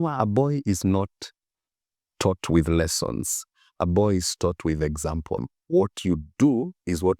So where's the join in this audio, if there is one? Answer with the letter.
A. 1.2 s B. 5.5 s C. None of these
B